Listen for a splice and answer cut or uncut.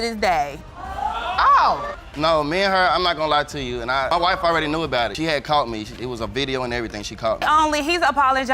cut